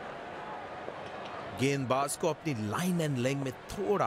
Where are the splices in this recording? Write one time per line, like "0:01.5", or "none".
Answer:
0:01.6

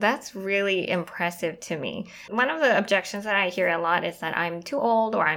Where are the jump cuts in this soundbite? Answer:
0:02.2

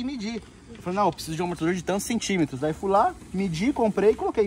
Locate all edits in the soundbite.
none

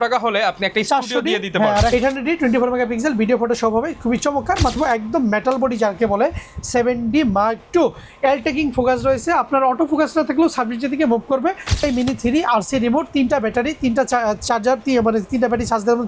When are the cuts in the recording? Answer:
0:01.9
0:04.7
0:11.8

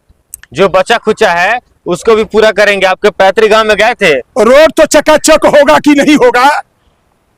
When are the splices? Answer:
none

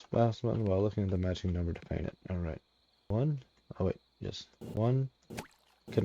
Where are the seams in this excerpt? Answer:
0:03.1
0:04.8

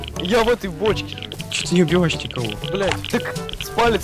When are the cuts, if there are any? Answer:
0:01.6
0:03.1

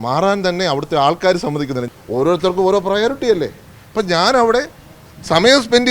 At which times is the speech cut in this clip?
0:01.8

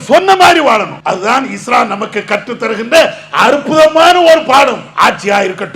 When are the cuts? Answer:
0:00.9
0:04.9

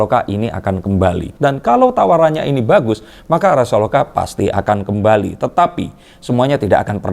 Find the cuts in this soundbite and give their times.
0:01.3

